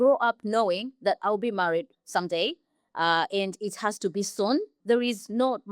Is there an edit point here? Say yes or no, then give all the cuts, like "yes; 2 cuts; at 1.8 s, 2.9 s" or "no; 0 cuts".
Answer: yes; 1 cut; at 4.8 s